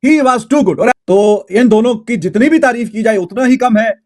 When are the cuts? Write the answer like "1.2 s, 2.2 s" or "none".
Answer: 0.9 s